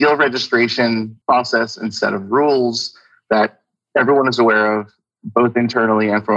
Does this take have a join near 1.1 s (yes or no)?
yes